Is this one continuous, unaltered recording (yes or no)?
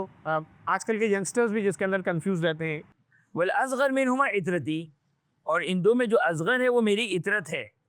no